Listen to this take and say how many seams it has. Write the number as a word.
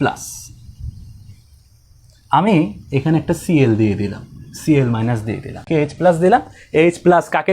one